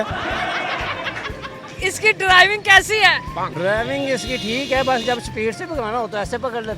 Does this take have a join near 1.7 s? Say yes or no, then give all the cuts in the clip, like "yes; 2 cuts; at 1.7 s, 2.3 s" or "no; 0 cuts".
yes; 1 cut; at 1.7 s